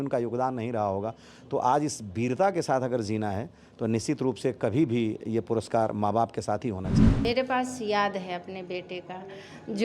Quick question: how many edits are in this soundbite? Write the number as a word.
one